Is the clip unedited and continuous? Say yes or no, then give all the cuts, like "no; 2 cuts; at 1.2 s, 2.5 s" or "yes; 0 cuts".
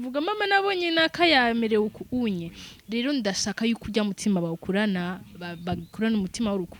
yes; 0 cuts